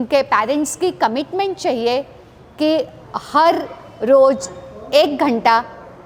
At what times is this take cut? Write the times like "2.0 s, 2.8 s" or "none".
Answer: none